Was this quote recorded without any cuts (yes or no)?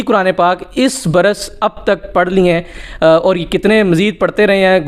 yes